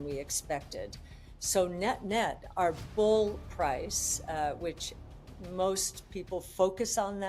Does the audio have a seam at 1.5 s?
no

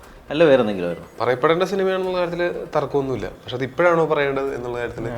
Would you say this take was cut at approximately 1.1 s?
yes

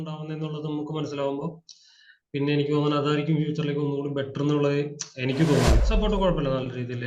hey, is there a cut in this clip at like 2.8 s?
no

